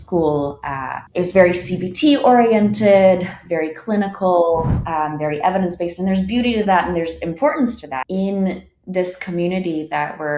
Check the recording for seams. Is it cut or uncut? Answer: cut